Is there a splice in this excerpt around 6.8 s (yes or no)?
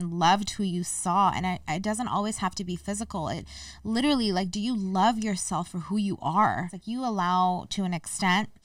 yes